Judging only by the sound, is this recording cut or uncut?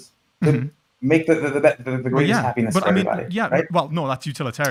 uncut